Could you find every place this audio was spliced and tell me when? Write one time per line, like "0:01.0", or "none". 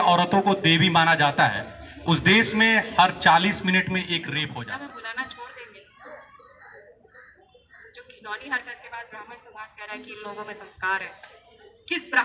0:04.5